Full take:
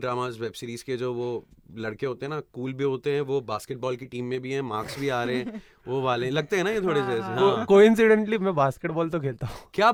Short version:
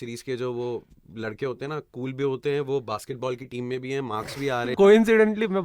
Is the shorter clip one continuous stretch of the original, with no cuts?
no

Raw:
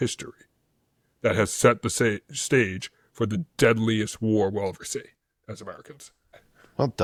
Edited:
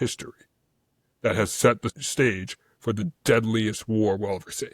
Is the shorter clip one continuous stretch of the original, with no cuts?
no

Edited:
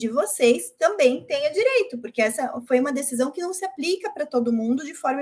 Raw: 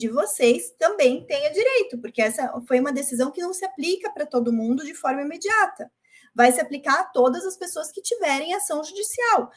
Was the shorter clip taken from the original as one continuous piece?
yes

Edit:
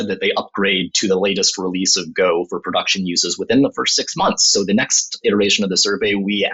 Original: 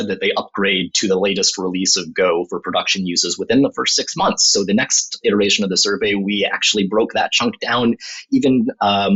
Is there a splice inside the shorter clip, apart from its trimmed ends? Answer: no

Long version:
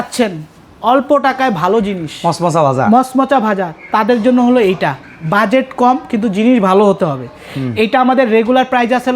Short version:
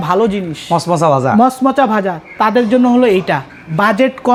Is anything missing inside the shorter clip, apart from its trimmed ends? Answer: no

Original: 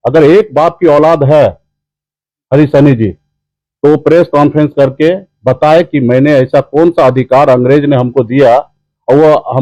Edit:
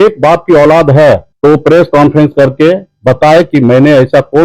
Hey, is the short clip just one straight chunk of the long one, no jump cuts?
no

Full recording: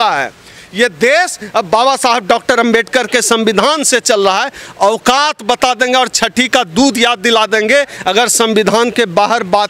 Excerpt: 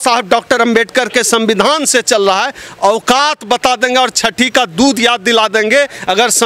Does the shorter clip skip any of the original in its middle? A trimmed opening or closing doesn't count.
no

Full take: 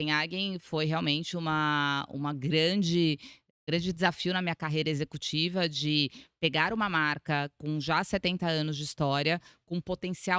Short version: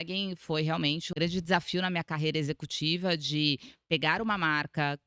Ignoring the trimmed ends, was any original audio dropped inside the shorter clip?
yes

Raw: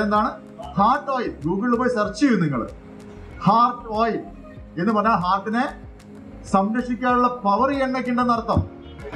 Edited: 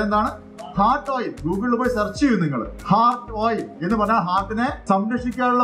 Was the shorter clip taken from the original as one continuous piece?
no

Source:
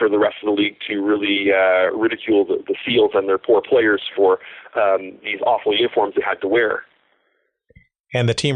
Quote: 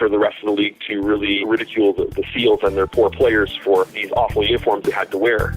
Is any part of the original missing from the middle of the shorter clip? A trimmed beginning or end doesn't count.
yes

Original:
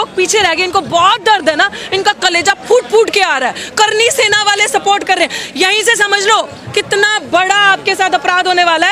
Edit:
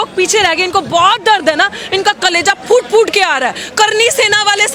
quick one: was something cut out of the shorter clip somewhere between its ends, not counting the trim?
no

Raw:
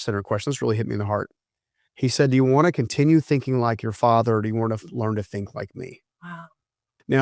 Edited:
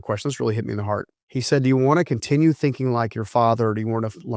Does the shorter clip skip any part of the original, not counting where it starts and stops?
yes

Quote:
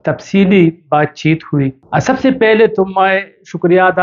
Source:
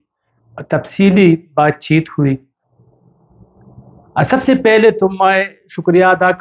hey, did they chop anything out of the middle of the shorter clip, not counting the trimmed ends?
yes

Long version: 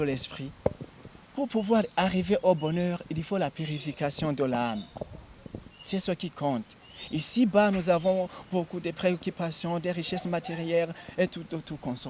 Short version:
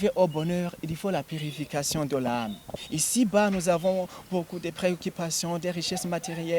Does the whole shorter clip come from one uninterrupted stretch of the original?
no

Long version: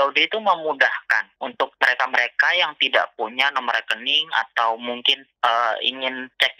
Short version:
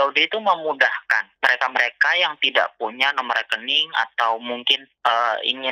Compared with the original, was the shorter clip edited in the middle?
yes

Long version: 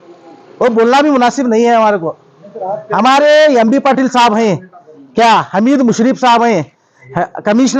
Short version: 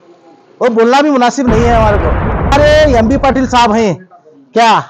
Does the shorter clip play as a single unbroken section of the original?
no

